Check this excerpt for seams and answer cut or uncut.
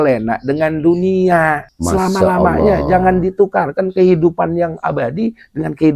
cut